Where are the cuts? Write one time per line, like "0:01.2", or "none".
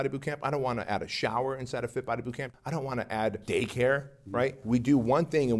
0:02.5
0:03.4
0:04.6